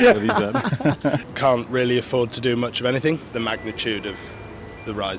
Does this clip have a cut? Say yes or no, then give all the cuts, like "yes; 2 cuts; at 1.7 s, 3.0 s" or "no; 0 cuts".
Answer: yes; 2 cuts; at 1.2 s, 3.3 s